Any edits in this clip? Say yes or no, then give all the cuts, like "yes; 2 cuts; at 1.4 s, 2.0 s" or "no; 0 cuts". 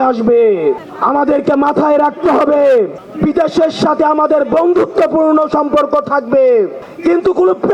yes; 3 cuts; at 0.9 s, 3.0 s, 6.8 s